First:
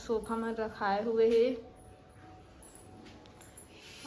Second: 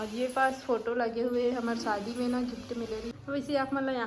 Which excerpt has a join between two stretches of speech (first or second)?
second